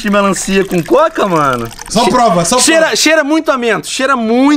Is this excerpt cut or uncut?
cut